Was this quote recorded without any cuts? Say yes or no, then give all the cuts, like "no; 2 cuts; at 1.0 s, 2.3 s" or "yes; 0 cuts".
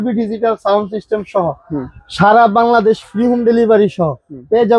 yes; 0 cuts